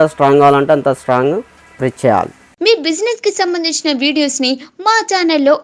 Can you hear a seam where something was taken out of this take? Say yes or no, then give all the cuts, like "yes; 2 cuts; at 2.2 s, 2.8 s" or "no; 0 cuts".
yes; 1 cut; at 2.6 s